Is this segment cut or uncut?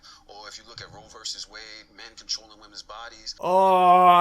cut